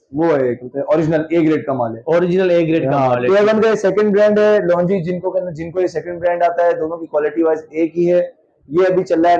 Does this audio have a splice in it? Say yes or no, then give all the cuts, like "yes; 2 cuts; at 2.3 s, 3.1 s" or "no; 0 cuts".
no; 0 cuts